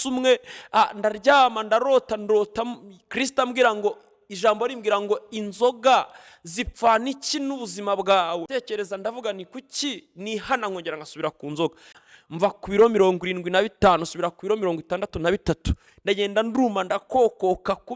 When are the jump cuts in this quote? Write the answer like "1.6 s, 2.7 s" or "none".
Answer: 8.5 s, 12.1 s